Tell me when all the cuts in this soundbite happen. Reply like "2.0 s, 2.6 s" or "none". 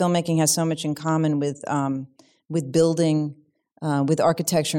none